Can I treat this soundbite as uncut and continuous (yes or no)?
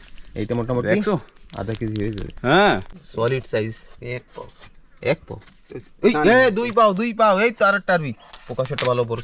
no